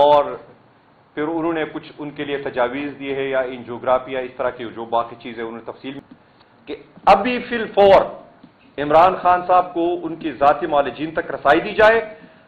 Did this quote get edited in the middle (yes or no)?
yes